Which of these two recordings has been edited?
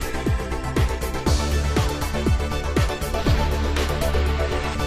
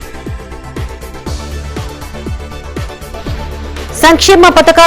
second; 1 cut; at 3.5 s

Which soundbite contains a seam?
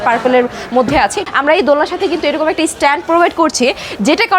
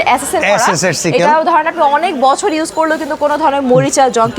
first; 1 cut; at 1.2 s

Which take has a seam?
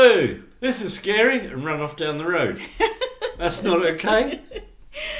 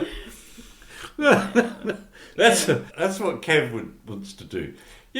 second; 1 cut; at 2.9 s

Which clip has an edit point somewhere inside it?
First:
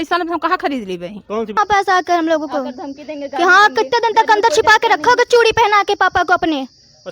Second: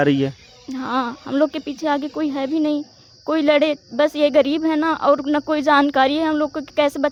first; 1 cut; at 1.6 s

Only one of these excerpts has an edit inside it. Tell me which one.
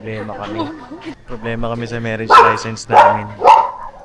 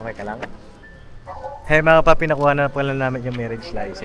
first; 1 cut; at 1.0 s

